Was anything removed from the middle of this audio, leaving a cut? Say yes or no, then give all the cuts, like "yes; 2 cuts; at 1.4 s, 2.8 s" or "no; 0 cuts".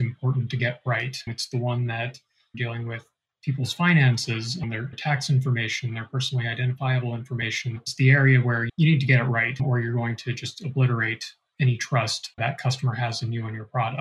yes; 2 cuts; at 4.9 s, 12.4 s